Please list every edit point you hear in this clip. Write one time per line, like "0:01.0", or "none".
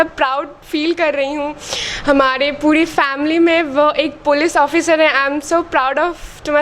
none